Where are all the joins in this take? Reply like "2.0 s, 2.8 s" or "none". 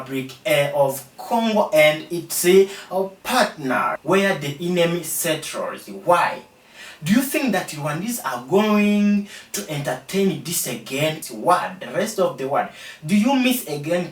3.9 s, 11.2 s